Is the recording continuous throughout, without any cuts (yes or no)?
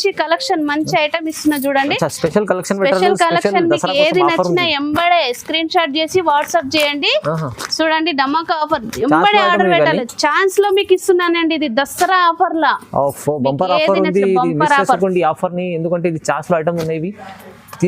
yes